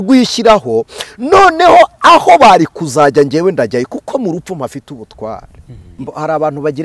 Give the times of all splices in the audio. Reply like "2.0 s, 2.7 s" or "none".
5.9 s